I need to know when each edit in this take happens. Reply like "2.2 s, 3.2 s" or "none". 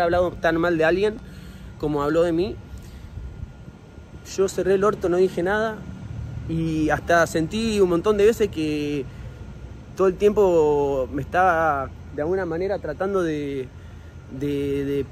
none